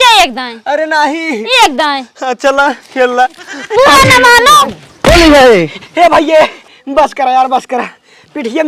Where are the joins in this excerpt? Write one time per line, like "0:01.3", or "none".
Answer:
0:04.6